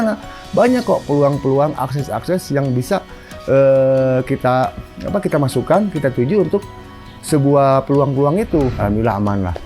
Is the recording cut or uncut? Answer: cut